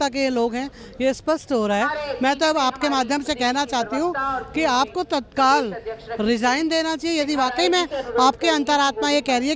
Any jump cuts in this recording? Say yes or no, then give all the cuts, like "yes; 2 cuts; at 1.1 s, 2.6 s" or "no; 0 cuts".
no; 0 cuts